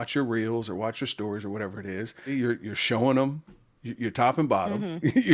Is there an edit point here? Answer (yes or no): yes